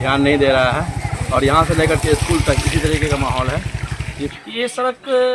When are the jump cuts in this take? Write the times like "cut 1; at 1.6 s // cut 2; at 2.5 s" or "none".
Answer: cut 1; at 4.3 s